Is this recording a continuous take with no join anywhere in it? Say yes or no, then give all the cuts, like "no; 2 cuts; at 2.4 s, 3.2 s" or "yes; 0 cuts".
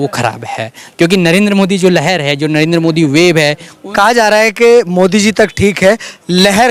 yes; 0 cuts